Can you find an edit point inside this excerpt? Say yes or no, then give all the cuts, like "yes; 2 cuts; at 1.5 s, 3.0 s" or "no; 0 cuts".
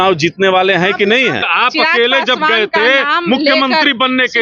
yes; 1 cut; at 1.4 s